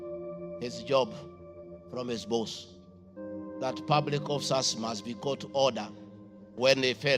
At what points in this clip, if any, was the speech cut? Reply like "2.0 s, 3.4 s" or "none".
none